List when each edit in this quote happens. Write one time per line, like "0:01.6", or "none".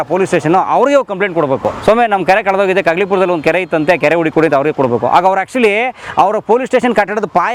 none